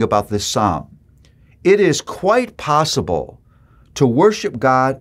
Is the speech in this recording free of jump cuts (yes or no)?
yes